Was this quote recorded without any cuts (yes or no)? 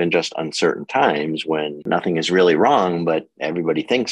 no